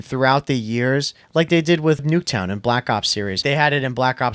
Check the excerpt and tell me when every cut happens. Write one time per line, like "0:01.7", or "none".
0:02.0
0:03.4